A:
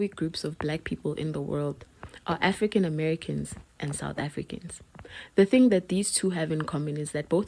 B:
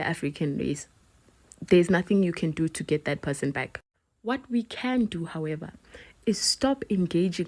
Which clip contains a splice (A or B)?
B